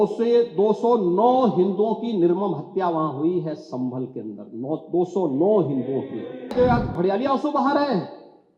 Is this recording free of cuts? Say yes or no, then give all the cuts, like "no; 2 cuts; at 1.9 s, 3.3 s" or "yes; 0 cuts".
no; 1 cut; at 6.5 s